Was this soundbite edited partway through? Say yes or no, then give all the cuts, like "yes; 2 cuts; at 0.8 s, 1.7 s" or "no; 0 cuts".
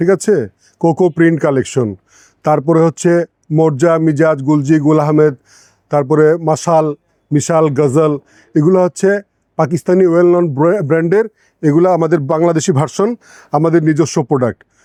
no; 0 cuts